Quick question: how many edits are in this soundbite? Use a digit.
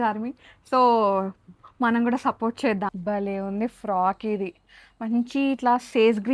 1